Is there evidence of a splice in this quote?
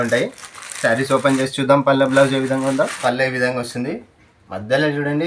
yes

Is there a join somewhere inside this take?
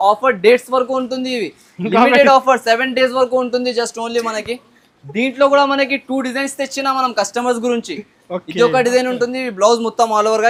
no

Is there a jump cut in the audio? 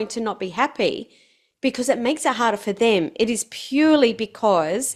no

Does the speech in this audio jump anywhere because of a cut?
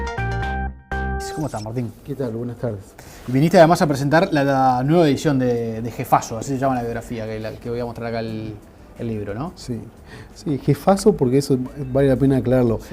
yes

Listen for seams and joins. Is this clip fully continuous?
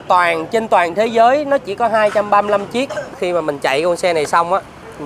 no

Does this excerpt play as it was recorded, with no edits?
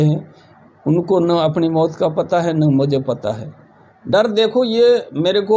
no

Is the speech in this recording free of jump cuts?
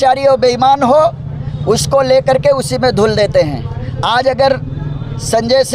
yes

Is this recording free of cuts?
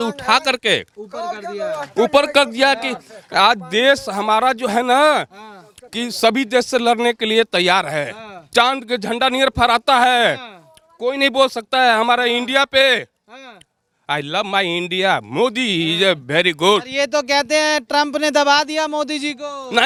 yes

